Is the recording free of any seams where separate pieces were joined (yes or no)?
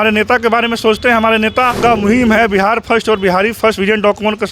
no